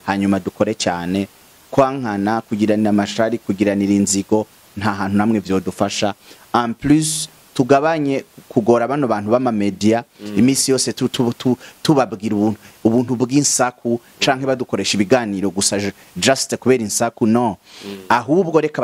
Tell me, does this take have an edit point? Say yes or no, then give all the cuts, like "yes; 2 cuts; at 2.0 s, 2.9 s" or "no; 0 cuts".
no; 0 cuts